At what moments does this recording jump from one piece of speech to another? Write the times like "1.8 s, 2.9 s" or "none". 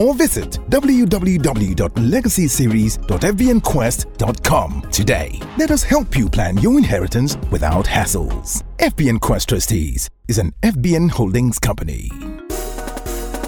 12.1 s

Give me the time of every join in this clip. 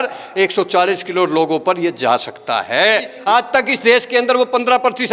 3.1 s

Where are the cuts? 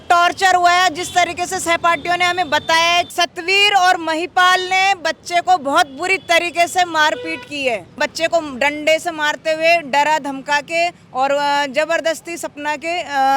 3.1 s, 8.0 s

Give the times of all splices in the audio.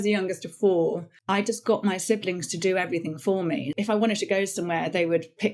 1.1 s, 3.7 s

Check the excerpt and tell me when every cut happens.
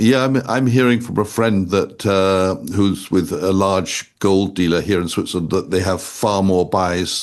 none

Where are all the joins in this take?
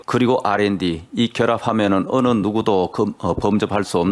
none

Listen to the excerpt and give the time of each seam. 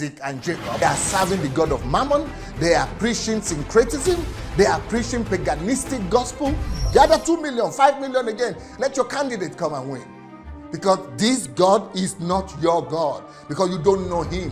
0.8 s, 6.8 s

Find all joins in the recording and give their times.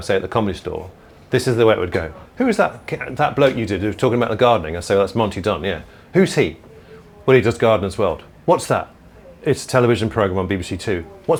none

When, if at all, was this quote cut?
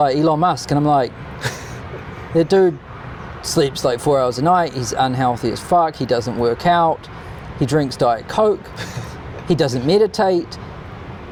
none

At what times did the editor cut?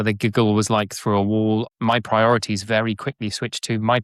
1.7 s

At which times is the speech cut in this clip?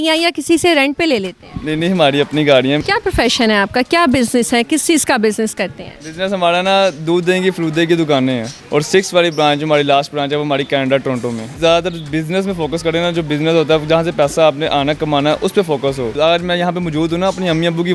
2.8 s, 8.5 s, 11.4 s, 16.1 s

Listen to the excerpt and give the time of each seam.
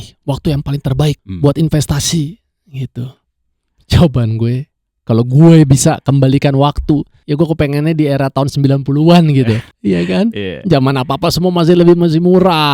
1.3 s, 7.2 s, 9.7 s

